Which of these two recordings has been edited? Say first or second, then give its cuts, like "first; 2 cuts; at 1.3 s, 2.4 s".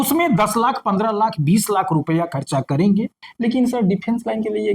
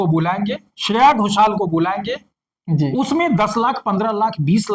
first; 1 cut; at 3.2 s